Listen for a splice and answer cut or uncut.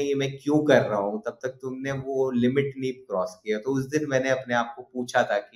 uncut